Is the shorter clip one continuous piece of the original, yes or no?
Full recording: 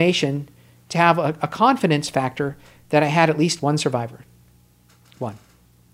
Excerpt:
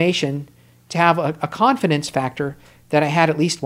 yes